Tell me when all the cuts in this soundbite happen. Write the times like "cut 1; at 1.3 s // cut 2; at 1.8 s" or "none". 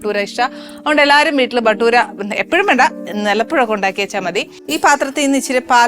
cut 1; at 4.6 s